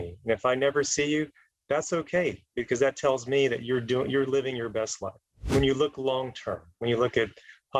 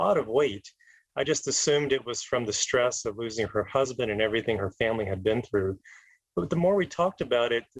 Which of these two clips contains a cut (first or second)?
first